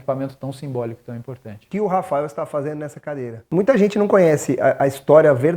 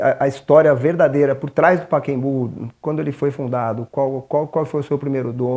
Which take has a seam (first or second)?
first